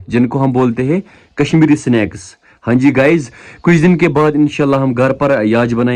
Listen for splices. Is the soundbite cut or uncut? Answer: uncut